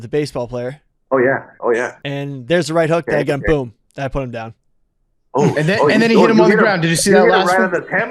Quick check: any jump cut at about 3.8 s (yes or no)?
no